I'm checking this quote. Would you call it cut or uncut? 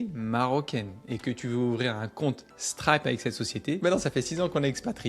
cut